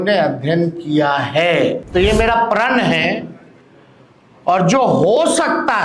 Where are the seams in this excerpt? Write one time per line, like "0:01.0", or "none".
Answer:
0:01.8